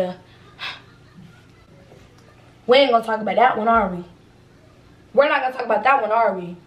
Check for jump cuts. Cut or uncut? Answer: uncut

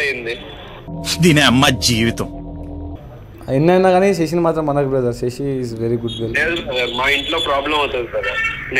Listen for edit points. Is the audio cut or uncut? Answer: uncut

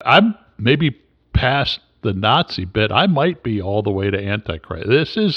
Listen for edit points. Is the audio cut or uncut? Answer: uncut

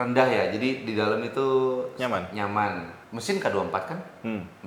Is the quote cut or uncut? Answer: uncut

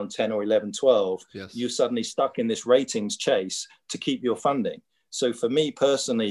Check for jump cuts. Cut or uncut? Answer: uncut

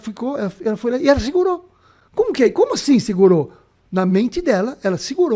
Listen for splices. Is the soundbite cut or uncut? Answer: uncut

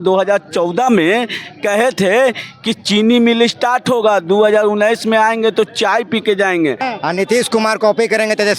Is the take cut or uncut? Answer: cut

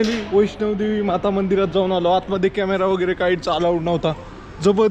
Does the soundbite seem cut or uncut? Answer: uncut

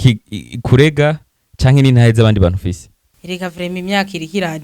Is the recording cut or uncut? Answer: cut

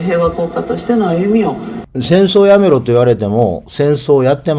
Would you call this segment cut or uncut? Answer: cut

